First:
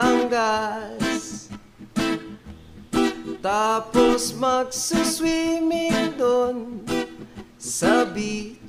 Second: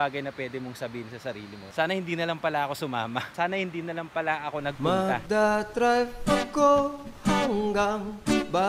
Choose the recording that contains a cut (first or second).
second